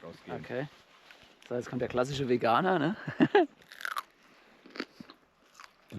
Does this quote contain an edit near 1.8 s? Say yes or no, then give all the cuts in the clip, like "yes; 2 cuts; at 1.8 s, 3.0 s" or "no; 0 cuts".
no; 0 cuts